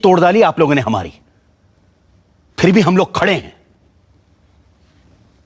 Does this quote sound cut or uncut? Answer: uncut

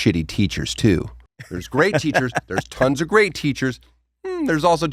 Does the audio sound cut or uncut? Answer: uncut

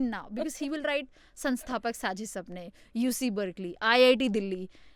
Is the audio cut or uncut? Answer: uncut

